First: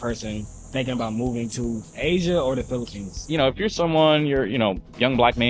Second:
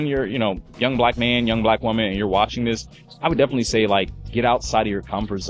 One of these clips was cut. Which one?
first; 1 cut; at 3.3 s

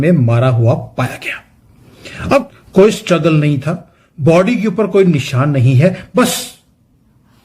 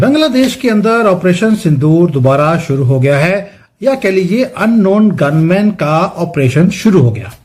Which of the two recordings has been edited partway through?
first; 1 cut; at 2.6 s

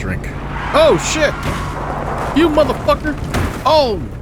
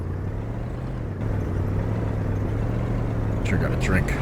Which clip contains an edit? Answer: second; 1 cut; at 1.2 s

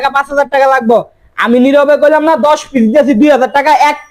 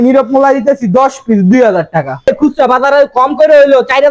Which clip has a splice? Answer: second; 1 cut; at 2.3 s

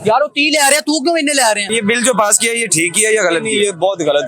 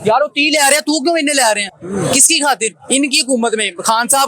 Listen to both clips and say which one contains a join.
first; 1 cut; at 1.7 s

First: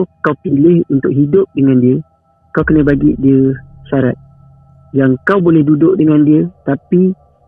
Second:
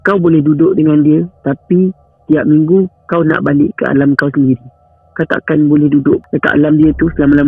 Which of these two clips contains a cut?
second; 1 cut; at 6.2 s

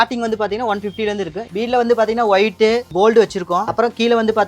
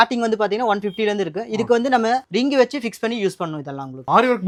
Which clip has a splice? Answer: first; 1 cut; at 1.5 s

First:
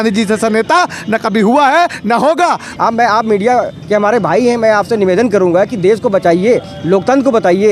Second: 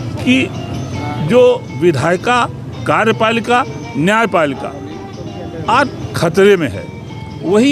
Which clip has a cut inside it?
first; 1 cut; at 2.7 s

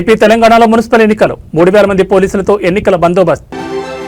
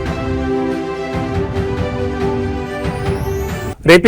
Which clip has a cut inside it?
second; 1 cut; at 2.6 s

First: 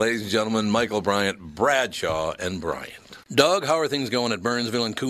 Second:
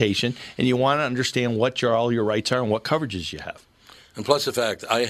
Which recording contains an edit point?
first; 1 cut; at 3.2 s

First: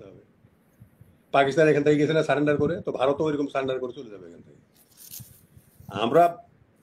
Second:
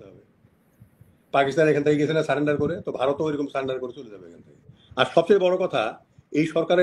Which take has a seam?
second; 1 cut; at 4.8 s

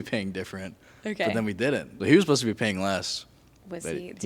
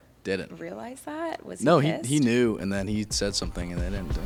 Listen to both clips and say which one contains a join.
first; 1 cut; at 1.9 s

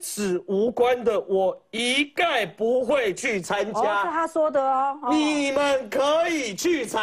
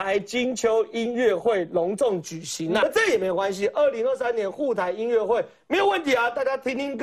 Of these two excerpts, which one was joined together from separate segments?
second; 1 cut; at 2.8 s

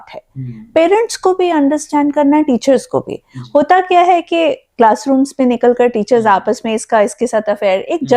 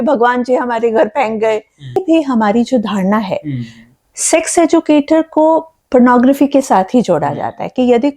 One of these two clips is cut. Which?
second; 1 cut; at 2.0 s

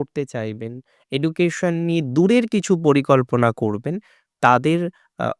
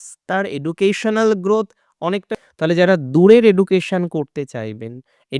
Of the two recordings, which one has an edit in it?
second; 1 cut; at 2.3 s

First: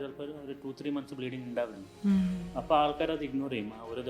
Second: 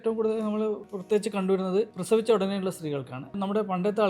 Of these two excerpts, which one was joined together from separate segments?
second; 3 cuts; at 0.9 s, 2.0 s, 3.4 s

